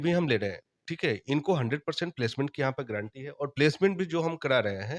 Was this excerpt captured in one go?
yes; 0 cuts

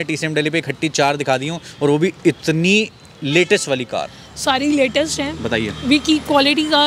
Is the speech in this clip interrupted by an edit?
no; 0 cuts

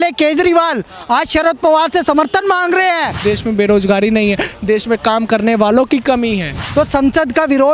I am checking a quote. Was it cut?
yes; 2 cuts; at 3.2 s, 6.6 s

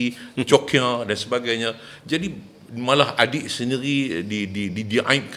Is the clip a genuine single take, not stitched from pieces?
yes; 0 cuts

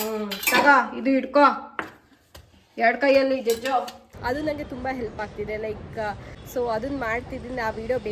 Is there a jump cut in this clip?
yes; 2 cuts; at 4.1 s, 6.3 s

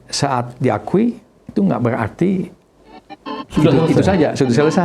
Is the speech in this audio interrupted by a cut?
no; 0 cuts

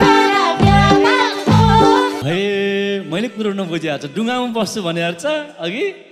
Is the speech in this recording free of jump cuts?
no; 1 cut; at 2.2 s

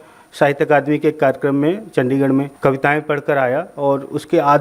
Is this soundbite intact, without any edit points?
no; 1 cut; at 2.5 s

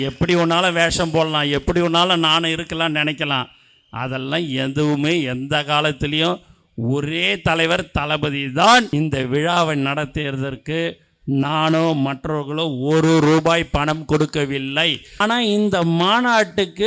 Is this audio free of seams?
no; 2 cuts; at 8.9 s, 15.2 s

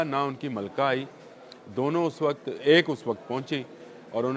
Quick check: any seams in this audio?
no; 0 cuts

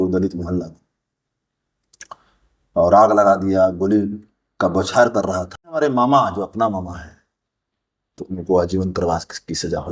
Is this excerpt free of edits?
no; 1 cut; at 5.8 s

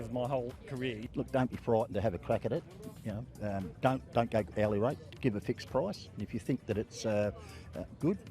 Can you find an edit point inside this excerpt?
yes; 1 cut; at 1.0 s

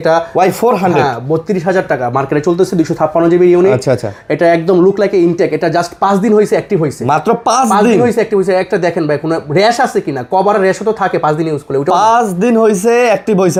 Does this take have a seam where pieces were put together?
no; 0 cuts

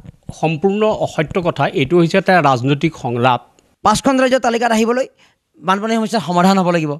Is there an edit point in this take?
yes; 1 cut; at 4.1 s

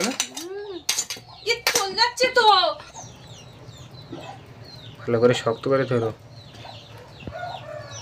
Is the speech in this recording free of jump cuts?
no; 1 cut; at 2.9 s

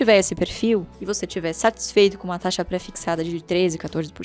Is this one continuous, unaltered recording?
yes; 0 cuts

